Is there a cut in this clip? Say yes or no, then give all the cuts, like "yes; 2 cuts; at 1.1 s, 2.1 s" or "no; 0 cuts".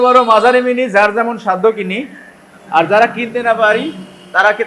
no; 0 cuts